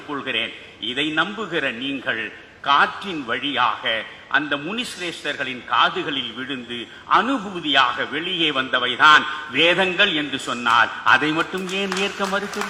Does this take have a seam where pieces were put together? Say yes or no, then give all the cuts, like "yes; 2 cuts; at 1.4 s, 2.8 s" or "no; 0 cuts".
no; 0 cuts